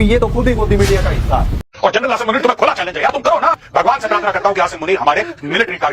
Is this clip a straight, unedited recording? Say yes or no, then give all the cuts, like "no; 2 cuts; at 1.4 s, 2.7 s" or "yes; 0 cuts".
no; 1 cut; at 1.6 s